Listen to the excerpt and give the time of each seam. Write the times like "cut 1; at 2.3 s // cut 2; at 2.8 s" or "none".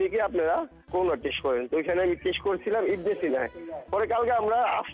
none